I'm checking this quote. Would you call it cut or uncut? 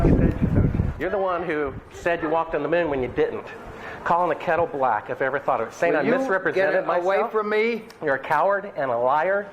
uncut